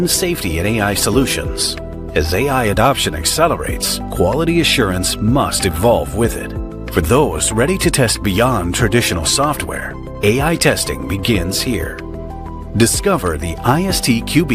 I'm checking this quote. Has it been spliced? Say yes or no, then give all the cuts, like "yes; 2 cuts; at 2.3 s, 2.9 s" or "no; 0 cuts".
no; 0 cuts